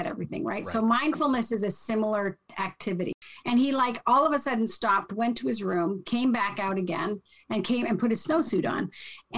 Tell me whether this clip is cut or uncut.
cut